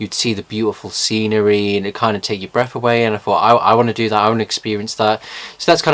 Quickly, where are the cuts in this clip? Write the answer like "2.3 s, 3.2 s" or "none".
4.9 s